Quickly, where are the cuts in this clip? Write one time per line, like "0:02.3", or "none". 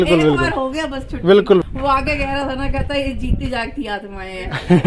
0:01.6